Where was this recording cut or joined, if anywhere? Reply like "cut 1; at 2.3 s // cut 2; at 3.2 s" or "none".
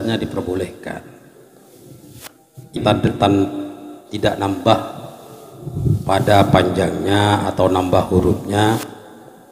none